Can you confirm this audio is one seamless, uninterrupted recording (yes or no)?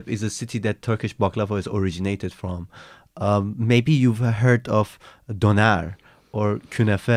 yes